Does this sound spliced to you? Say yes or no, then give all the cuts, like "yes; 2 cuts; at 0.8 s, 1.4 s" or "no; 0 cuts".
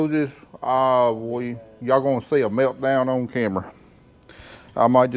no; 0 cuts